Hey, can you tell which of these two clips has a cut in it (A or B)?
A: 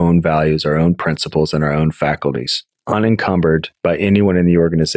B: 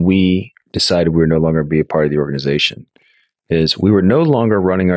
A